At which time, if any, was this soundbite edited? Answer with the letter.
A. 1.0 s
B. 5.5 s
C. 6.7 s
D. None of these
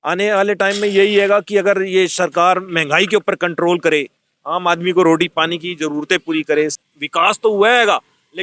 C